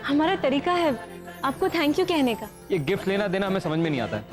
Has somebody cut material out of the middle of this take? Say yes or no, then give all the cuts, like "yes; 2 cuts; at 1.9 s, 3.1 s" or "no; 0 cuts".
yes; 1 cut; at 2.5 s